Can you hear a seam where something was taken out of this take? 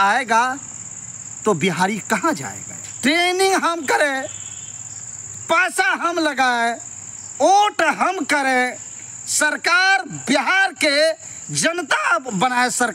yes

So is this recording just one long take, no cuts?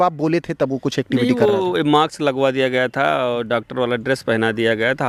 yes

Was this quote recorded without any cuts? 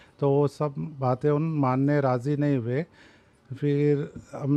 yes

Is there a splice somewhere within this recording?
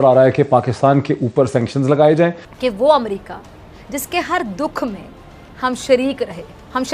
yes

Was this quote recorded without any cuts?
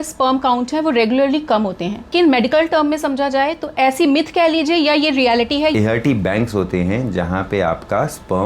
no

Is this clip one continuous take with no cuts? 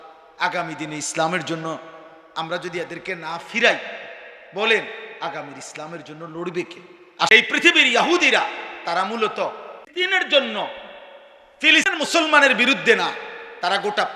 no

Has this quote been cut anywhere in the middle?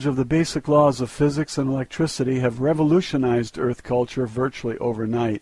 yes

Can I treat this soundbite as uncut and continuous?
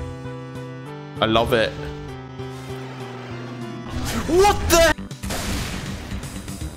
no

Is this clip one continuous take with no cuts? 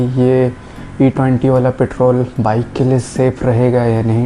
yes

